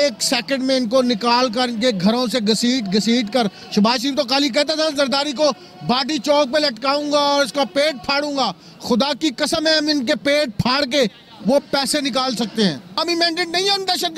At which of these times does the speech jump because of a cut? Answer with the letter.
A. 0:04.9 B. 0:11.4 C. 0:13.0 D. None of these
C